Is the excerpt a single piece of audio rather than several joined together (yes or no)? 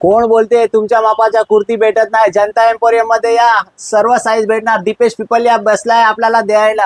yes